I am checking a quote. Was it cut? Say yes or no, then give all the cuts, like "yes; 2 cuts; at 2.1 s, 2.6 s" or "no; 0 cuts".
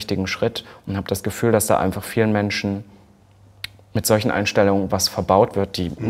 no; 0 cuts